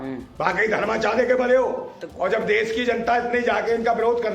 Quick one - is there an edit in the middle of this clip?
yes; 1 cut; at 2.0 s

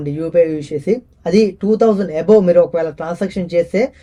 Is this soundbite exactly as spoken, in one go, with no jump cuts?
yes; 0 cuts

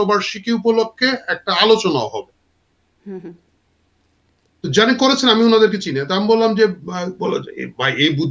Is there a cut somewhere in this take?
no; 0 cuts

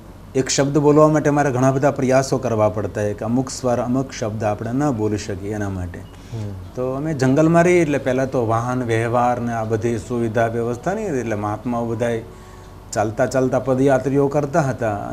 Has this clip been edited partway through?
no; 0 cuts

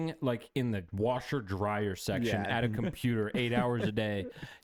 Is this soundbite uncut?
yes; 0 cuts

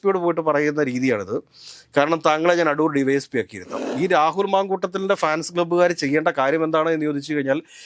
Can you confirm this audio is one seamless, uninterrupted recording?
no; 1 cut; at 3.8 s

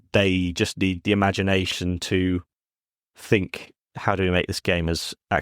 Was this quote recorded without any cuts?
no; 1 cut; at 1.0 s

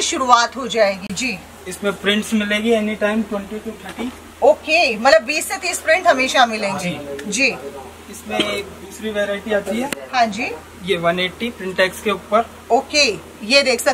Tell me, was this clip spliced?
no; 0 cuts

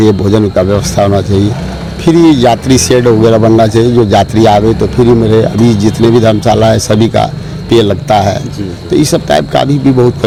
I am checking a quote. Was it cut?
no; 0 cuts

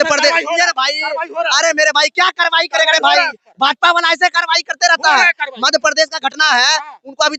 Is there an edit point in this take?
no; 0 cuts

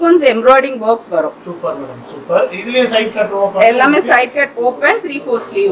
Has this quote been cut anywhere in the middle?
no; 0 cuts

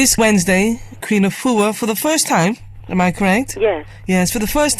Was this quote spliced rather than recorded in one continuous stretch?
no; 0 cuts

